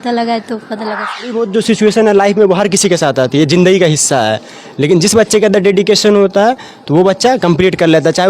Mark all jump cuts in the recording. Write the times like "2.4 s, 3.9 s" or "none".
1.3 s